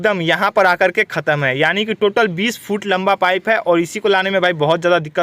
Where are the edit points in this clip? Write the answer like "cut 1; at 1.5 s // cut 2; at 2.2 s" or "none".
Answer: none